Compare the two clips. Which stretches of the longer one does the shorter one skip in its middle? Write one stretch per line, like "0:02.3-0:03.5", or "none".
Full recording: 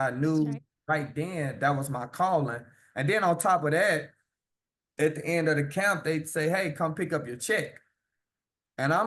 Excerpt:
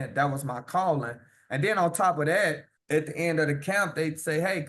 0:04.2-0:04.8